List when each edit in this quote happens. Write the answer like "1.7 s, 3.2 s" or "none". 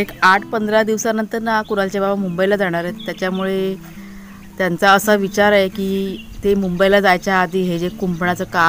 none